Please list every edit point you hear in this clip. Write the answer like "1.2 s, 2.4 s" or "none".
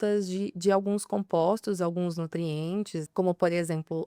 3.1 s